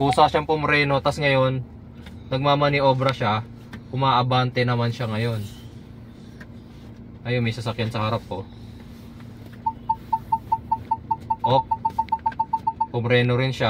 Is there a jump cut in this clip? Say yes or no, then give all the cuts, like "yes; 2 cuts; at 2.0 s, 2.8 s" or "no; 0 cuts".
no; 0 cuts